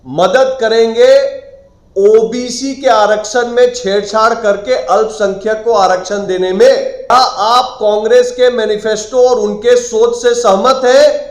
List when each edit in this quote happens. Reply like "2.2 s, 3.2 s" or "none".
7.1 s